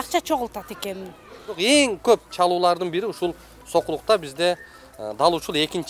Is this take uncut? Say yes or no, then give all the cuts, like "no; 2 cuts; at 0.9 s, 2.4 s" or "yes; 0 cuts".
no; 1 cut; at 1.5 s